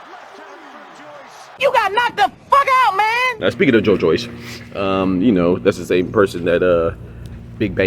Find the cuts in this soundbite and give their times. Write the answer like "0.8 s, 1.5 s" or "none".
1.5 s, 3.3 s